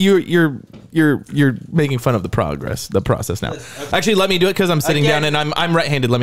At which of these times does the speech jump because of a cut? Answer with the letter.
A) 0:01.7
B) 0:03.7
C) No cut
B